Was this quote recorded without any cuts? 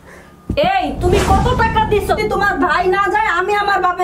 no; 1 cut; at 2.2 s

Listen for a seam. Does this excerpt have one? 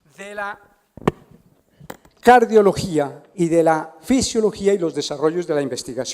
yes; 1 cut; at 3.4 s

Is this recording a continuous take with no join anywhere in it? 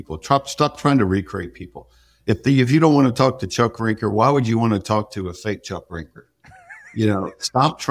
yes; 0 cuts

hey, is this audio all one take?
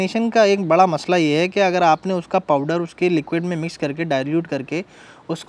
yes; 0 cuts

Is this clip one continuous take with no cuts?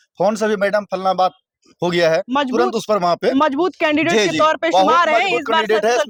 yes; 0 cuts

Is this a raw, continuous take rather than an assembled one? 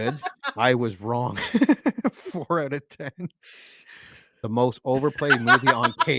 no; 1 cut; at 4.4 s

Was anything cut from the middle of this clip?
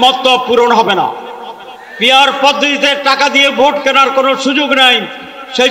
no; 0 cuts

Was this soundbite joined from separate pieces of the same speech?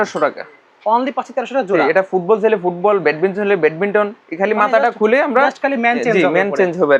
no; 0 cuts

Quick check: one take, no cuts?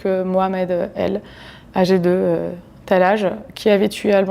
yes; 0 cuts

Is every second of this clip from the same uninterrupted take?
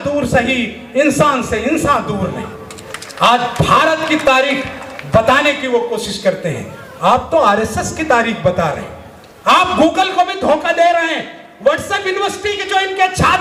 yes; 0 cuts

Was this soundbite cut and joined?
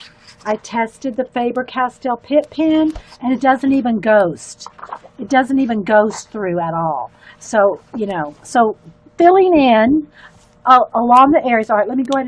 no; 0 cuts

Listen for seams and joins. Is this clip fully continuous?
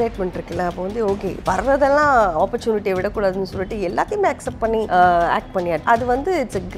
no; 2 cuts; at 4.9 s, 5.8 s

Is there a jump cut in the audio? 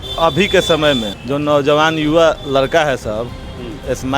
yes; 1 cut; at 1.2 s

